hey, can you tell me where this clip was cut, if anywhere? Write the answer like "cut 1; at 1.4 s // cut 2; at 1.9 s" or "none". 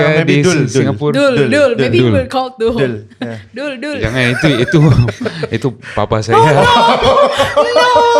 none